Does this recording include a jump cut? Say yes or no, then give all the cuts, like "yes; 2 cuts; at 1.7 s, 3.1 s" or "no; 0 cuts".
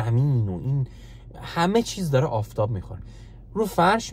no; 0 cuts